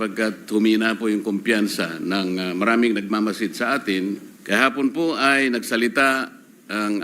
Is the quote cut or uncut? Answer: cut